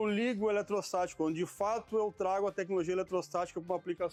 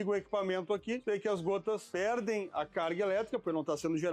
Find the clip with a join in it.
second; 2 cuts; at 1.0 s, 1.9 s

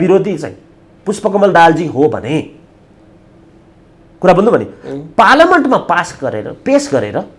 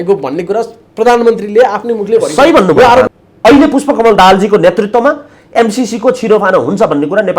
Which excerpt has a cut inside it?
second; 1 cut; at 3.1 s

